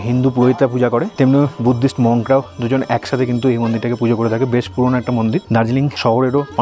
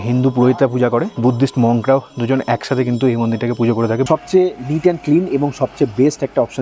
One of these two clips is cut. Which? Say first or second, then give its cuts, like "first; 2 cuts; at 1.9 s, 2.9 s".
second; 2 cuts; at 1.1 s, 4.1 s